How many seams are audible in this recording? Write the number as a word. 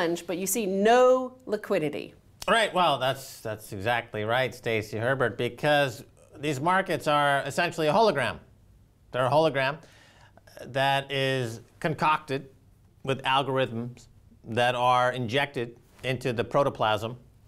one